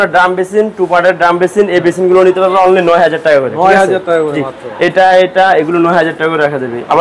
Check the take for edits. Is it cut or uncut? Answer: uncut